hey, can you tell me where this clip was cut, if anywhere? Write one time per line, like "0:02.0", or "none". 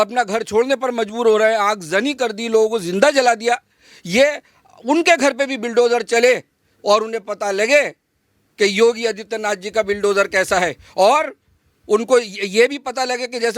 none

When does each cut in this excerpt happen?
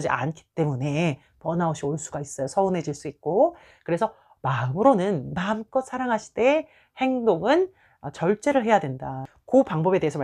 0:09.1

